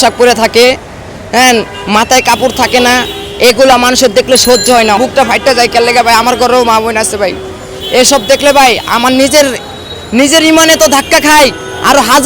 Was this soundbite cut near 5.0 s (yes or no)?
yes